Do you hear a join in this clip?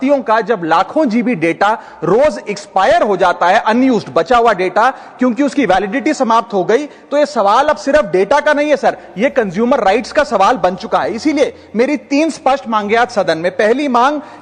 no; 0 cuts

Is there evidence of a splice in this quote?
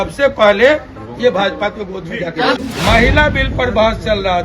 yes; 1 cut; at 2.6 s

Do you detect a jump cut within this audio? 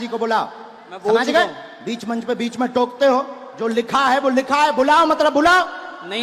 no; 0 cuts

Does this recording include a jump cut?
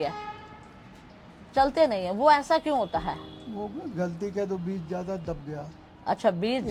no; 0 cuts

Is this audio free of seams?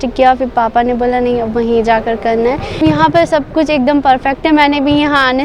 no; 1 cut; at 2.8 s

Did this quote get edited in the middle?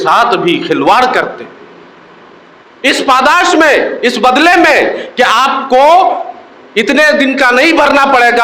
no; 0 cuts

